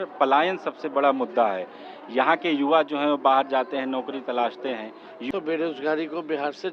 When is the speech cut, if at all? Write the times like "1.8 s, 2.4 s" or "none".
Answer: 5.3 s